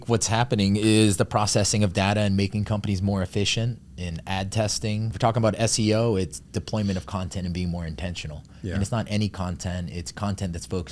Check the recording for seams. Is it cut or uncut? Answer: cut